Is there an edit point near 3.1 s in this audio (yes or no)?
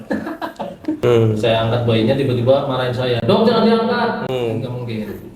no